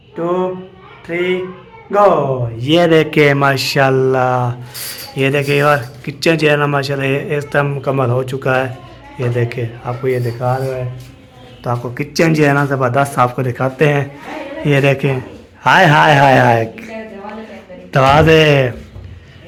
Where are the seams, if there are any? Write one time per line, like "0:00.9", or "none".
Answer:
none

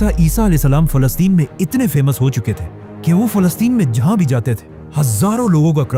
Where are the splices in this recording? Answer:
none

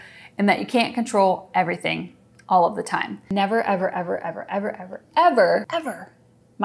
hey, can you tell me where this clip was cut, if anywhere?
0:03.2
0:05.7

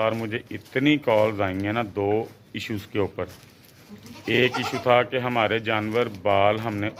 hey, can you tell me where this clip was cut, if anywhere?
none

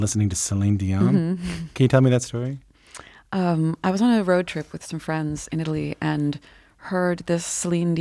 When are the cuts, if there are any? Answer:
none

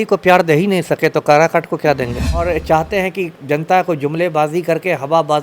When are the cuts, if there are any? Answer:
0:02.5

